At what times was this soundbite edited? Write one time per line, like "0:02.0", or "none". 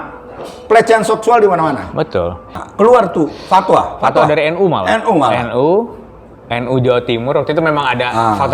0:02.6